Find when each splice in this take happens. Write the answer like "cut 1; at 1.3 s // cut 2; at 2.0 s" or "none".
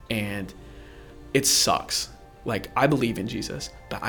cut 1; at 2.3 s